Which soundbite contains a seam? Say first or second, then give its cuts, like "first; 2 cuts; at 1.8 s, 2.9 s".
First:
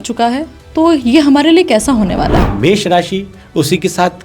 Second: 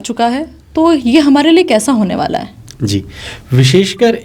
first; 1 cut; at 2.5 s